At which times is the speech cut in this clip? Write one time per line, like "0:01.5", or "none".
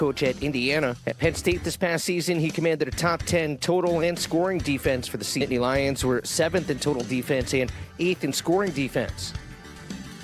0:05.4
0:09.3